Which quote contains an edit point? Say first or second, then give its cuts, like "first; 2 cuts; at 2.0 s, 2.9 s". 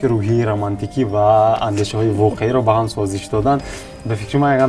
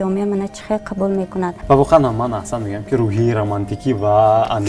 second; 1 cut; at 1.6 s